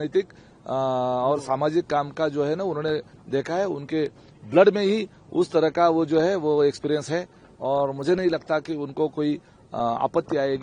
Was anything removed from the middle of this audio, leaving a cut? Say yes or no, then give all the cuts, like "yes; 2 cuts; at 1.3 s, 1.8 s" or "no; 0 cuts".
no; 0 cuts